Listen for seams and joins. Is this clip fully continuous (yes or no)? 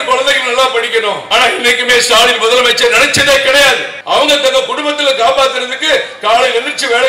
no